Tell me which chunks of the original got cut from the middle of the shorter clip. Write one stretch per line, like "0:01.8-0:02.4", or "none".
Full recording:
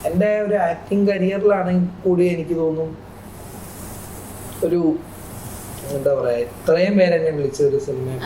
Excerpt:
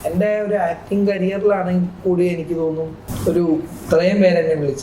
0:03.0-0:04.4
0:05.2-0:06.6